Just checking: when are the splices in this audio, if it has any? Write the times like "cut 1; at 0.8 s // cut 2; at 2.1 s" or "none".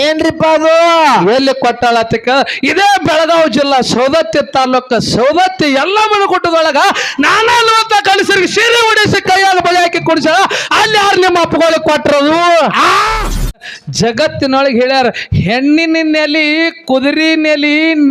cut 1; at 13.8 s